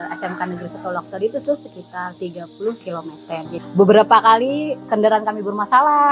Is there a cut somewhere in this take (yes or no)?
yes